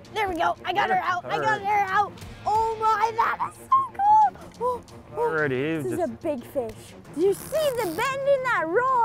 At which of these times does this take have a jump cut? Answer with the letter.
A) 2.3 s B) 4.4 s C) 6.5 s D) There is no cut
D